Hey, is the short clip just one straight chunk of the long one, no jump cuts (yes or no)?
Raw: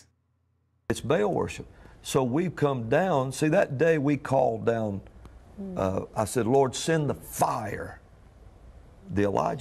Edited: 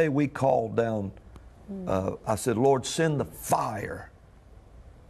yes